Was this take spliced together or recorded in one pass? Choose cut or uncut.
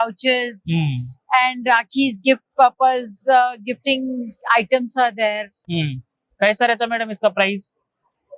uncut